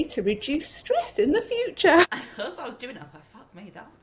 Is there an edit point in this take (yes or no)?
yes